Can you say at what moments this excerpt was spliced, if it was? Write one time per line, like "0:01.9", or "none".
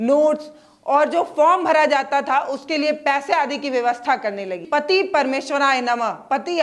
0:04.7